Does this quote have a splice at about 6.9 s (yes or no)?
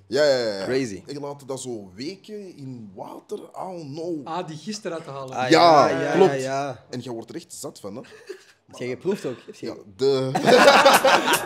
yes